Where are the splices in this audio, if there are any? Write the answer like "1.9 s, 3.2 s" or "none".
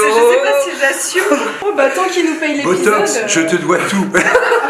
1.6 s